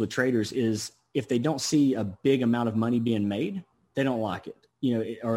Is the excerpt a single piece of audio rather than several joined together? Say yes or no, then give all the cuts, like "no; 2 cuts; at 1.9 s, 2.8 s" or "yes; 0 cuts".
no; 1 cut; at 3.7 s